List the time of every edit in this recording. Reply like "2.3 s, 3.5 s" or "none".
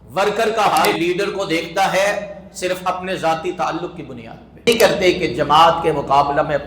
0.9 s, 4.7 s